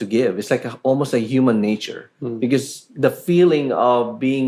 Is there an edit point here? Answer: no; 0 cuts

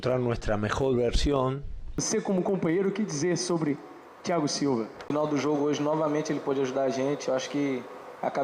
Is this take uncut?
no; 2 cuts; at 2.0 s, 5.1 s

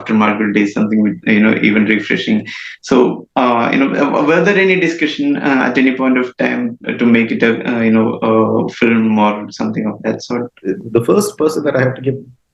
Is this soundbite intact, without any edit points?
no; 1 cut; at 10.5 s

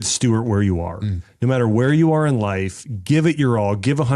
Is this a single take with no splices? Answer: yes; 0 cuts

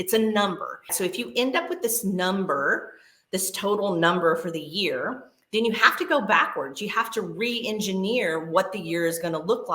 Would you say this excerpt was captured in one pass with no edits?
no; 1 cut; at 0.9 s

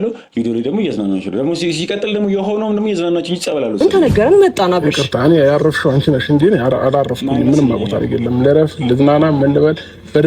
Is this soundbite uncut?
no; 1 cut; at 3.8 s

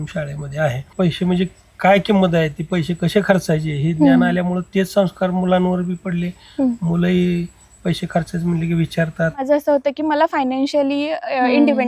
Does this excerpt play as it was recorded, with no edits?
no; 2 cuts; at 0.9 s, 9.4 s

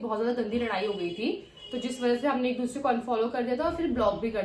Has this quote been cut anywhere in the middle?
no; 0 cuts

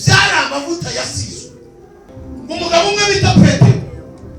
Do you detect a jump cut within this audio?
yes; 1 cut; at 2.1 s

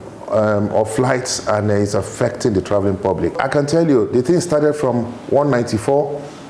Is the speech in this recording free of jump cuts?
no; 1 cut; at 3.4 s

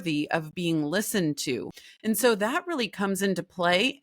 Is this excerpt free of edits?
no; 1 cut; at 1.7 s

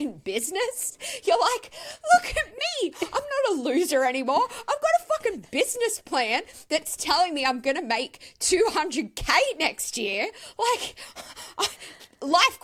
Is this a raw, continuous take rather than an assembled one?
yes; 0 cuts

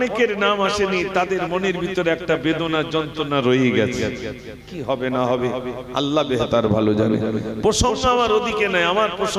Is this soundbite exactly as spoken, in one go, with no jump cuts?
yes; 0 cuts

